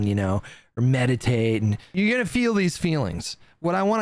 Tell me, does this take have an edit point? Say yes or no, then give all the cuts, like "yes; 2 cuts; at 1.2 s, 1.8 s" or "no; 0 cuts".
yes; 1 cut; at 1.8 s